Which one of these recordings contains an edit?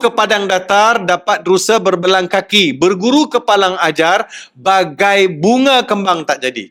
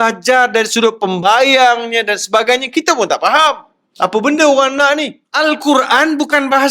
second; 1 cut; at 5.2 s

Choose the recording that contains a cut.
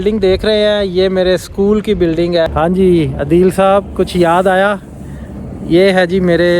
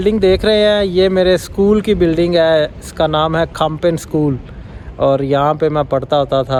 first; 1 cut; at 2.5 s

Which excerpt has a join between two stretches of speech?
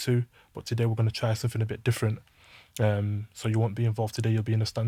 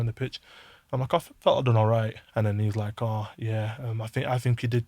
second; 1 cut; at 2.2 s

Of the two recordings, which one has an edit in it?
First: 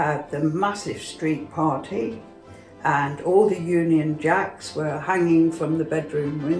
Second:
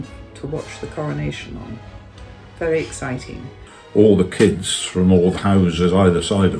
second; 1 cut; at 3.5 s

